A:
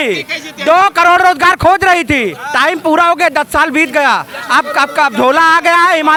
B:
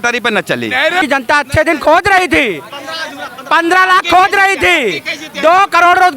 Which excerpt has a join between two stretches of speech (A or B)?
B